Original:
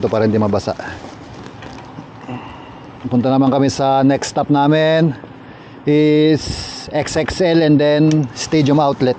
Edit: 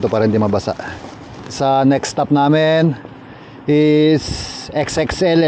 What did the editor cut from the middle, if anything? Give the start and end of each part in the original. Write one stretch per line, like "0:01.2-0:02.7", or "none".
0:01.6-0:03.7